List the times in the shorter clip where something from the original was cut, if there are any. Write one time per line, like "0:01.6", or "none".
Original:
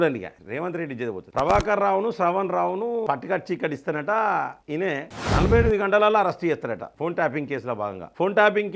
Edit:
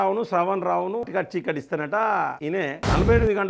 0:01.0
0:02.5

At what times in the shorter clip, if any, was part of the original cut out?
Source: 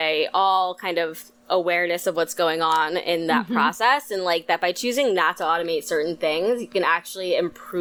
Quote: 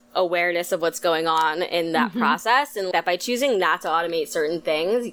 0:02.9

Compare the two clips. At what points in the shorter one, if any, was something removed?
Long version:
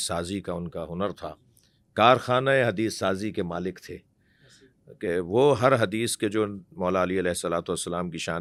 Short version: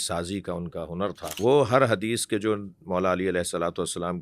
0:01.4

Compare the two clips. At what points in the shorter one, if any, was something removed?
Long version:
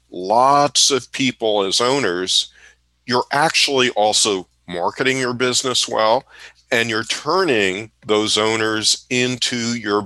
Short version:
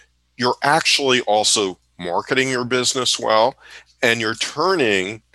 none

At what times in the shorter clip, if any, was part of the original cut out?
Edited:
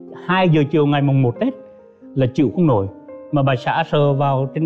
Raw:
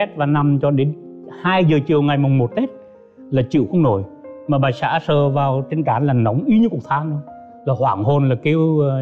none

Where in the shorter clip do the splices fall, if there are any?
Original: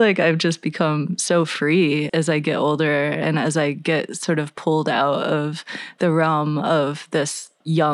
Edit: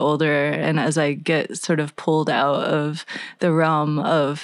none

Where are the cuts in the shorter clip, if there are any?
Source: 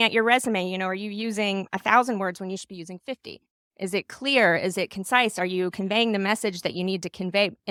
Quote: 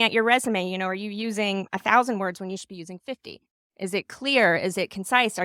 none

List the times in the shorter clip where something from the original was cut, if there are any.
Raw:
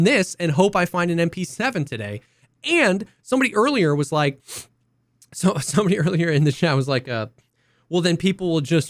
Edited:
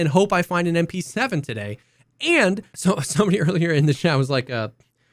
0:02.7

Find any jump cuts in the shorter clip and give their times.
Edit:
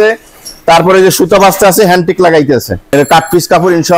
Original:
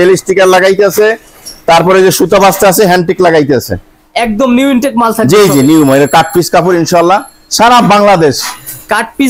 0:02.9

